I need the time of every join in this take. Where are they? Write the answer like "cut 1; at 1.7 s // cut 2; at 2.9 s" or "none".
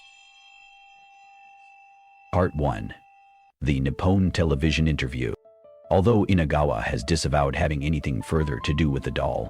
cut 1; at 2.3 s

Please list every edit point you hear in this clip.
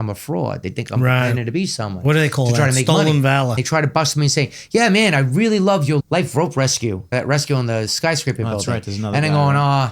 cut 1; at 3.6 s // cut 2; at 6.0 s // cut 3; at 7.1 s

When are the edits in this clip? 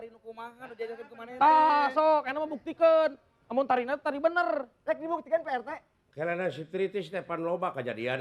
none

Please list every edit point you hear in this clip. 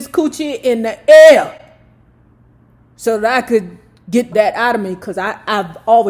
cut 1; at 4.3 s

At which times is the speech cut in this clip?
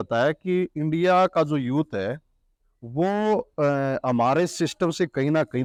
none

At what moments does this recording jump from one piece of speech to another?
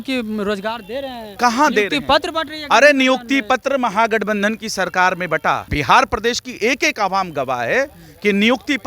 cut 1; at 5.7 s

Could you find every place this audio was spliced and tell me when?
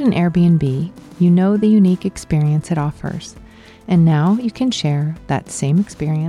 none

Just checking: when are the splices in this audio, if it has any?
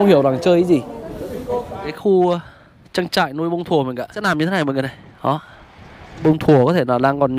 cut 1; at 1.9 s // cut 2; at 4.2 s // cut 3; at 6.2 s

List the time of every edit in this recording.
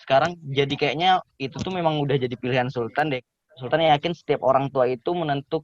cut 1; at 3.2 s

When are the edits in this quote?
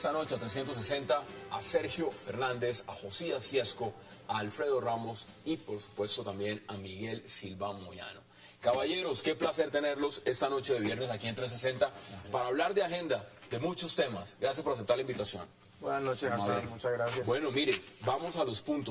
none

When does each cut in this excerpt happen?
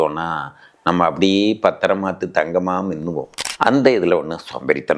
cut 1; at 3.5 s

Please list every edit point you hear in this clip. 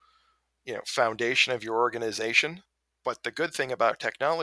cut 1; at 2.7 s

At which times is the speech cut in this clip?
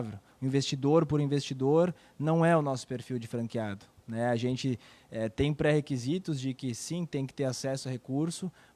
none

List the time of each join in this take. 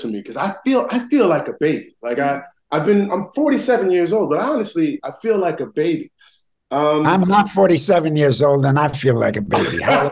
none

